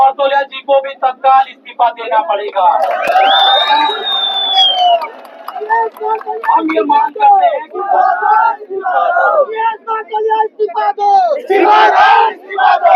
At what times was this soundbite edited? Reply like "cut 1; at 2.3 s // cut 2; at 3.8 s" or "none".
none